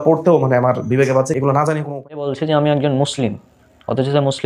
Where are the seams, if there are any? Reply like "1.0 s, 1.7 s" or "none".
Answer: 1.8 s